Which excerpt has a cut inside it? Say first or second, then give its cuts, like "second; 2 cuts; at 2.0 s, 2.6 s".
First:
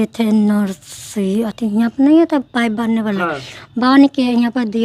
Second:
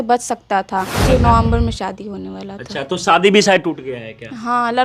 second; 1 cut; at 1.0 s